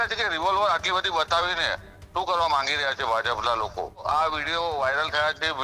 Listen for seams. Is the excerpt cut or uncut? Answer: cut